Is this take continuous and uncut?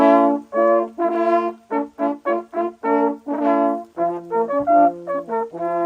yes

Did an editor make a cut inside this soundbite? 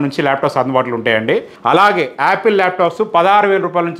yes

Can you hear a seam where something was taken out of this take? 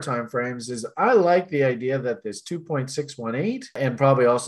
no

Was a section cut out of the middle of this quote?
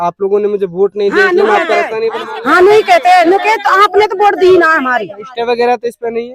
no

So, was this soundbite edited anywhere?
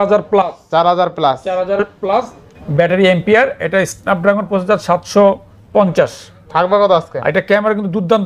no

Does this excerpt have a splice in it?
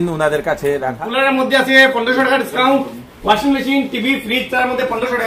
yes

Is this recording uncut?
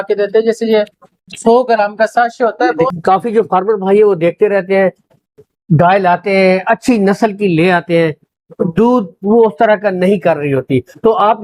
no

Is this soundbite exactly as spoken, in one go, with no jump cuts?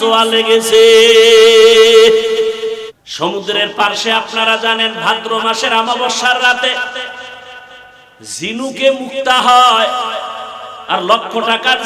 no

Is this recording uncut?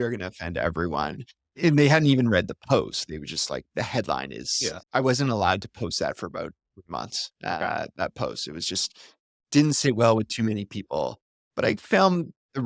yes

